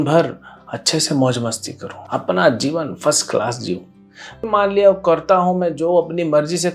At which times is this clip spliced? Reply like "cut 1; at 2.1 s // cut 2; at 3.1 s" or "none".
cut 1; at 4.4 s